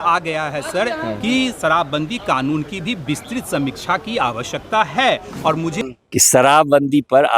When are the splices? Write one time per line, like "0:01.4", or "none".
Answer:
0:05.8